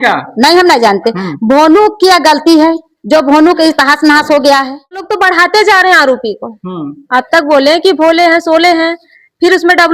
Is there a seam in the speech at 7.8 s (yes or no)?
no